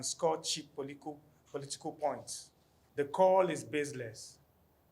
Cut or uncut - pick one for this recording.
cut